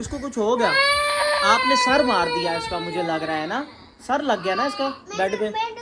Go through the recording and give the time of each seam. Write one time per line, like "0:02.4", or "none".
none